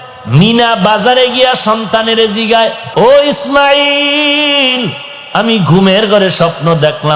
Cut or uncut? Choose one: cut